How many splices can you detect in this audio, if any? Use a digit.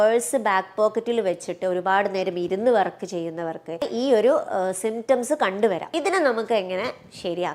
2